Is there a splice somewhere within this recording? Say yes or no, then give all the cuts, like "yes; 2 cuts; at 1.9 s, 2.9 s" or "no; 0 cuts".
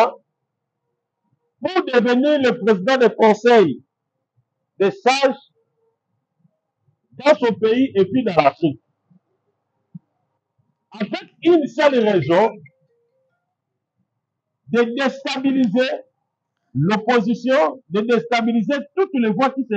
no; 0 cuts